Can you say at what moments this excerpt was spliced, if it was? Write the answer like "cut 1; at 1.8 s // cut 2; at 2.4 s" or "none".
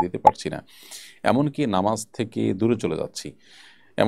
none